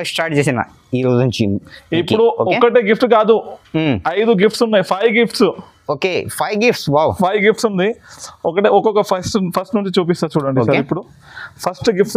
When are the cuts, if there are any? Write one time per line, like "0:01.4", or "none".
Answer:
none